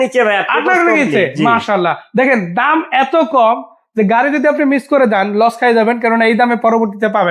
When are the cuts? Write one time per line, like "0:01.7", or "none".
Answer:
none